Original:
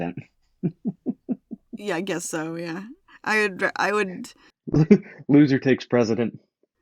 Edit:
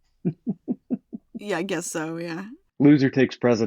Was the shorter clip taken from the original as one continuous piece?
no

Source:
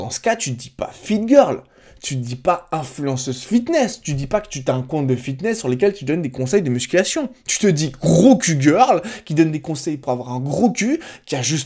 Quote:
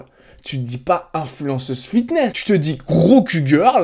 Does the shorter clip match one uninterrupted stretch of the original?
no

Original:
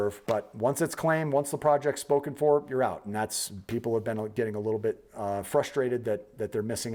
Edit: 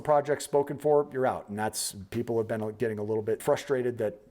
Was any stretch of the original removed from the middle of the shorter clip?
yes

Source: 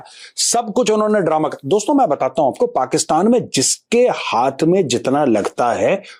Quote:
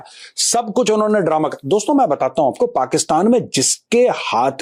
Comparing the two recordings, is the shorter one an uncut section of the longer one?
yes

